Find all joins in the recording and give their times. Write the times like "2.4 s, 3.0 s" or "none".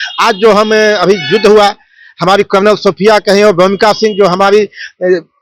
none